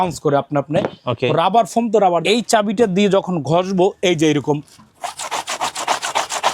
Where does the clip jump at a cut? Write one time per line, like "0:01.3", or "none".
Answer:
0:02.2